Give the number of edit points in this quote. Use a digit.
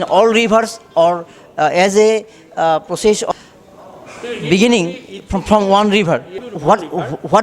2